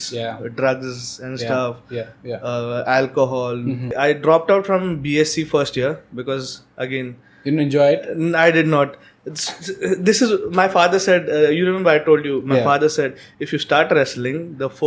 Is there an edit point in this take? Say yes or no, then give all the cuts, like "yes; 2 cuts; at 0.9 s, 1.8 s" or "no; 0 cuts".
yes; 1 cut; at 3.9 s